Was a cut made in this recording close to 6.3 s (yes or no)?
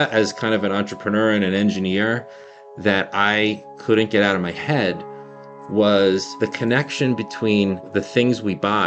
yes